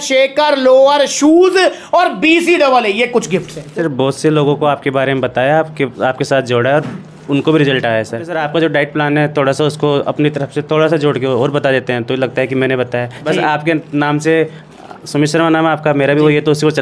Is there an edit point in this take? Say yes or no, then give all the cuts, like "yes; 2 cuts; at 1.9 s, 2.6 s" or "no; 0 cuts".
yes; 3 cuts; at 3.6 s, 8.3 s, 13.2 s